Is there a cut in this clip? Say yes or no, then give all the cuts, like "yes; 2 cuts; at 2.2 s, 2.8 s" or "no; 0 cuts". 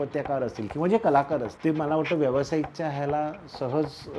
yes; 1 cut; at 1.5 s